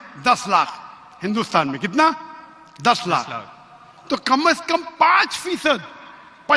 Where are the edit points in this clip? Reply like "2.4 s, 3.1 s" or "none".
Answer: none